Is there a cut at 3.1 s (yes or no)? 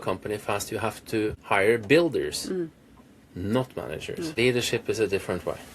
no